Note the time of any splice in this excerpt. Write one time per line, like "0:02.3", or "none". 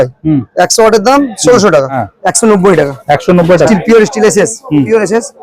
0:02.0
0:03.7